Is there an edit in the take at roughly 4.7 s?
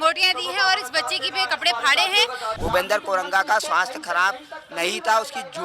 no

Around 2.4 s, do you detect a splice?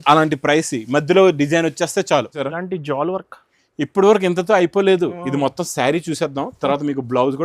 yes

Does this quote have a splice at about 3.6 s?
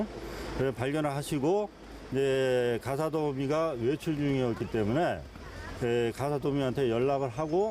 yes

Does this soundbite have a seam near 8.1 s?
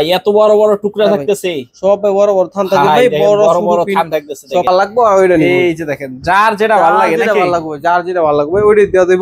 no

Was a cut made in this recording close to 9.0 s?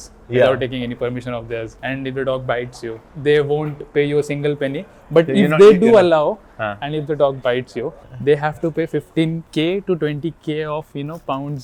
no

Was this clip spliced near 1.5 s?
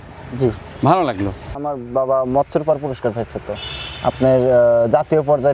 yes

